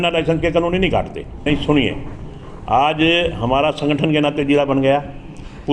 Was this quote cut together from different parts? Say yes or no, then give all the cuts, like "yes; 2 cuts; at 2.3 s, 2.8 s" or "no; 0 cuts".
yes; 1 cut; at 1.4 s